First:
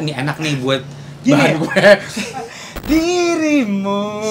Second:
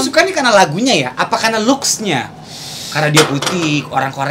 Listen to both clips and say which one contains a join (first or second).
first